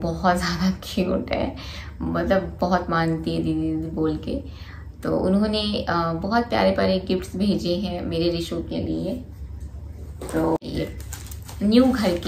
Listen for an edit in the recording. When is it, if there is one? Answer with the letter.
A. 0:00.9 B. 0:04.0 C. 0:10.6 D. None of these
C